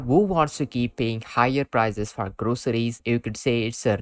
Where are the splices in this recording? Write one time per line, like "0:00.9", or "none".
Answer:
0:03.0